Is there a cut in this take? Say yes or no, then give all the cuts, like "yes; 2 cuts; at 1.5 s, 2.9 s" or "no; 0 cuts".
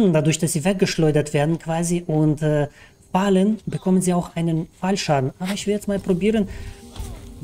no; 0 cuts